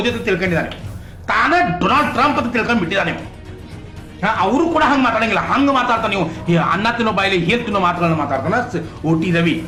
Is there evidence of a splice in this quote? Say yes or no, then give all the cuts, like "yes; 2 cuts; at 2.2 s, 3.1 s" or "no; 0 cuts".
no; 0 cuts